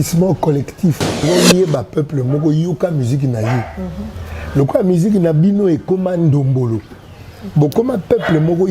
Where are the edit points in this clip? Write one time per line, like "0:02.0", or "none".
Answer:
0:01.2